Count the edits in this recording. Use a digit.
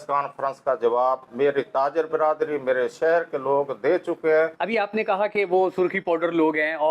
1